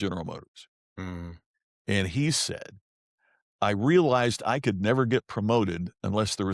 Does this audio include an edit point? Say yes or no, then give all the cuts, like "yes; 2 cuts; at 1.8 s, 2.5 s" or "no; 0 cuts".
no; 0 cuts